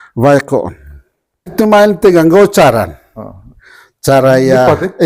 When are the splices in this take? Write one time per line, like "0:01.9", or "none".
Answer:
0:01.5

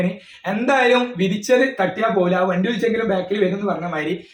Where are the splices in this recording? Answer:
none

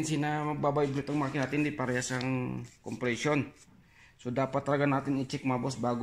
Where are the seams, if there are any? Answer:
none

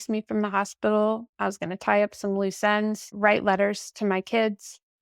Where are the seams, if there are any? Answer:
0:03.1

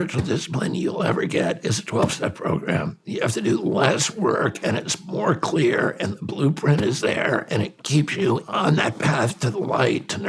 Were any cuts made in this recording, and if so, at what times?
0:03.0
0:08.4

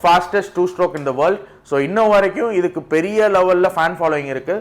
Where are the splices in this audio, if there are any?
none

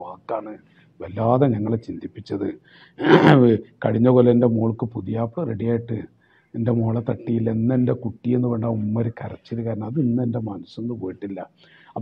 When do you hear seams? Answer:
none

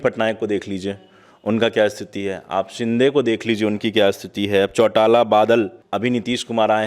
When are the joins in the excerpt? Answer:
0:05.8

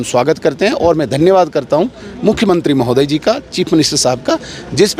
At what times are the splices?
none

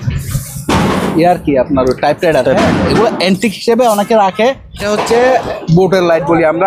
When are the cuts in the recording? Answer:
0:04.8

